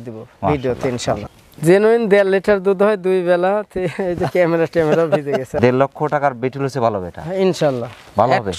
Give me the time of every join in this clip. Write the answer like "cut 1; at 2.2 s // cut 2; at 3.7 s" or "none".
cut 1; at 1.3 s // cut 2; at 5.6 s